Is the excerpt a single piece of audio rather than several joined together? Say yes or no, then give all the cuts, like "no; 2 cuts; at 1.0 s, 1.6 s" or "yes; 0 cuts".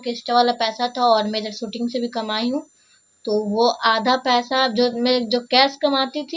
yes; 0 cuts